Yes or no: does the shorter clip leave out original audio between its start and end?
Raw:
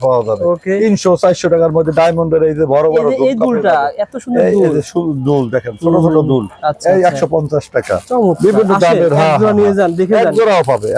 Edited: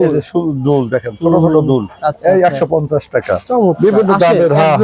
no